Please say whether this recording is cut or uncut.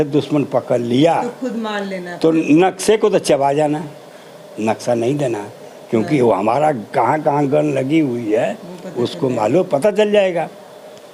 uncut